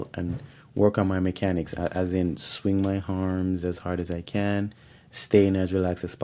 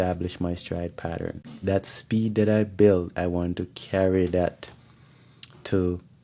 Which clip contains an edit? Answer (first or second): second